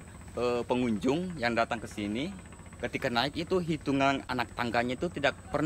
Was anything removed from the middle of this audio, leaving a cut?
yes; 1 cut; at 4.3 s

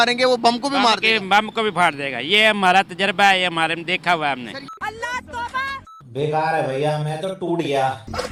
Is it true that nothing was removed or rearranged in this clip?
yes; 0 cuts

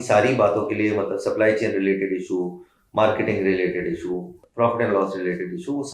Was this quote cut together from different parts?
yes; 1 cut; at 4.4 s

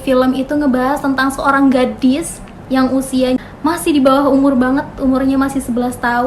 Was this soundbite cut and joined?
yes; 1 cut; at 3.4 s

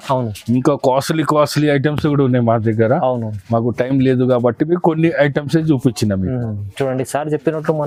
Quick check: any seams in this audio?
no; 0 cuts

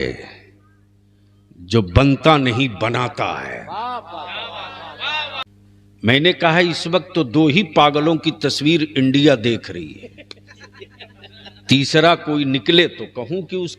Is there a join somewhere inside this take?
yes; 1 cut; at 5.4 s

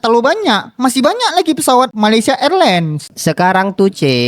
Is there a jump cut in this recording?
yes; 2 cuts; at 1.9 s, 3.1 s

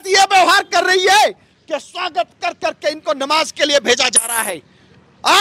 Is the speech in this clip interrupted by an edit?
no; 0 cuts

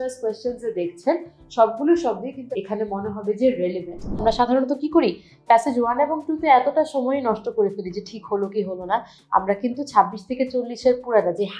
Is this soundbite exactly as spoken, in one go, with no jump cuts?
no; 2 cuts; at 2.4 s, 4.2 s

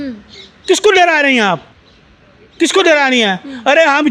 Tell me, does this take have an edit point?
no; 0 cuts

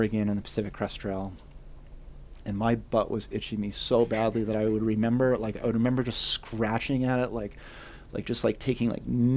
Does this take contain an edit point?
no; 0 cuts

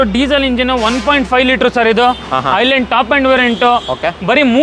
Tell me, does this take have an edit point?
no; 0 cuts

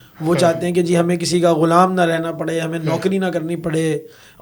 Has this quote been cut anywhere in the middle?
no; 0 cuts

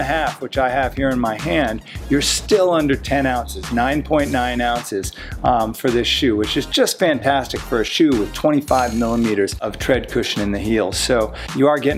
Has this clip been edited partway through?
no; 0 cuts

